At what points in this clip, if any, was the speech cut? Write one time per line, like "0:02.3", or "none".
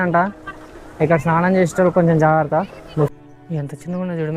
0:03.1